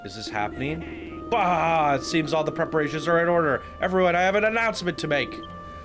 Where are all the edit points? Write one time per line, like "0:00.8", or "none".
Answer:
none

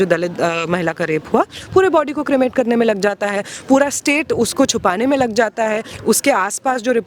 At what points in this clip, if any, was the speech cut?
none

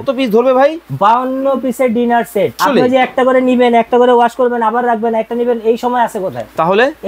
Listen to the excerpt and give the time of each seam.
0:02.6

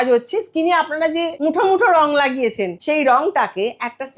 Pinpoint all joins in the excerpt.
0:01.3
0:02.8

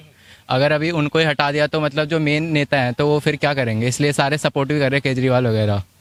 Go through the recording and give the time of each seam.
none

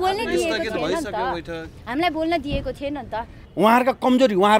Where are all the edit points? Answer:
0:03.4

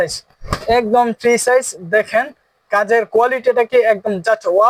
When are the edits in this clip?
none

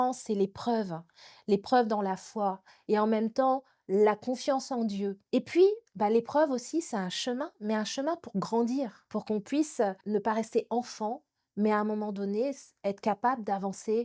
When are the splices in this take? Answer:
0:05.2

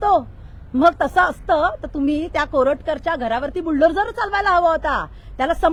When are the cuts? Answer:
none

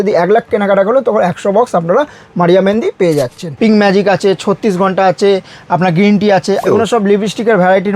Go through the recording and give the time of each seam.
0:03.4
0:06.6

